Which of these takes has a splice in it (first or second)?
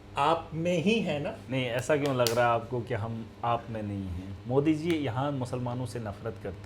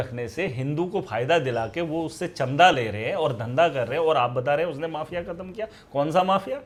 first